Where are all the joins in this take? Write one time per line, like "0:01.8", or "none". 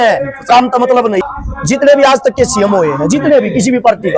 0:01.2